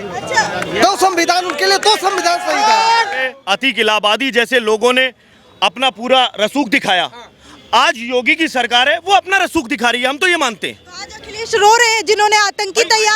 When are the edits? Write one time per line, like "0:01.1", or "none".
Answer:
0:03.2